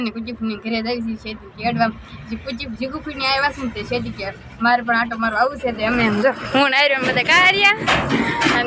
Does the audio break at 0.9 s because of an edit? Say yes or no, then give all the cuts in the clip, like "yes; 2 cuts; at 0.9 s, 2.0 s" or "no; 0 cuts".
no; 0 cuts